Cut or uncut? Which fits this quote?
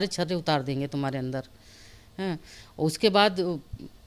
uncut